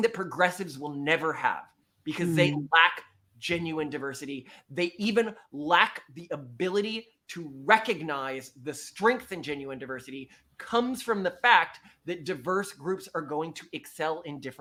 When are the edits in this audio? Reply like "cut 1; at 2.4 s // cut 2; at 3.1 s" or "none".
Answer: none